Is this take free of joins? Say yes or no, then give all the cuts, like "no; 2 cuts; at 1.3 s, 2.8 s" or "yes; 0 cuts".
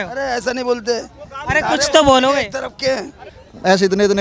no; 1 cut; at 3.1 s